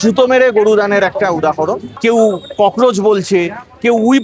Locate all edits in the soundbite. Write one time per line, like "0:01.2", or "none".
0:01.9